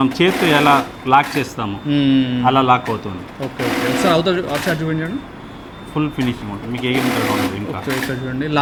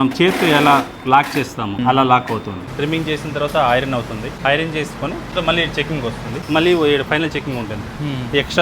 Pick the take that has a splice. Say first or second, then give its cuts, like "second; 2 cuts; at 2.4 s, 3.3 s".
second; 5 cuts; at 1.8 s, 2.7 s, 4.3 s, 5.3 s, 6.4 s